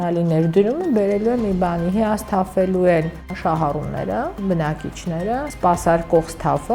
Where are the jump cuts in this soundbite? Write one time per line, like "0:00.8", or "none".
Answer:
0:03.3
0:04.3
0:05.5